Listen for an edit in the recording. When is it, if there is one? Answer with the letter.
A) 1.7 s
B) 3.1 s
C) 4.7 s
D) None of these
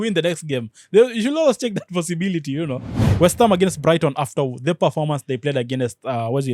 B